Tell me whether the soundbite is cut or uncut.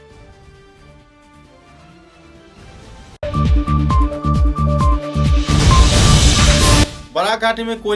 cut